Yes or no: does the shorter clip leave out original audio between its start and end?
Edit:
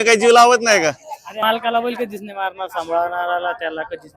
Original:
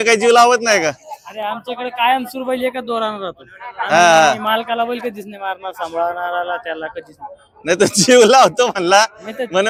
yes